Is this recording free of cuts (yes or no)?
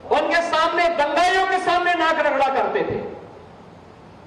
no